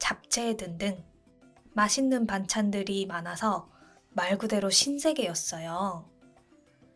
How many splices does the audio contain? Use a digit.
1